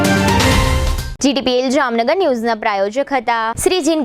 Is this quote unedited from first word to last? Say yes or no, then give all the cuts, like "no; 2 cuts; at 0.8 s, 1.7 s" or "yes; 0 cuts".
yes; 0 cuts